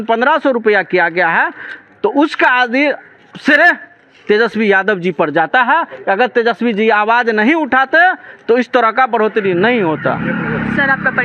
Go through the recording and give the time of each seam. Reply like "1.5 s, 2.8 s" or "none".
none